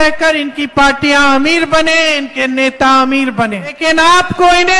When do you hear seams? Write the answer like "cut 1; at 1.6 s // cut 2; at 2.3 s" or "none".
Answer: cut 1; at 3.8 s